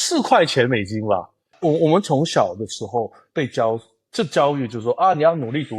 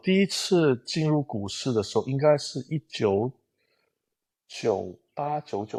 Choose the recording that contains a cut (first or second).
first